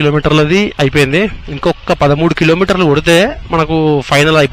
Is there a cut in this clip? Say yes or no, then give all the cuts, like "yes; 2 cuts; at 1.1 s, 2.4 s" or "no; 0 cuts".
no; 0 cuts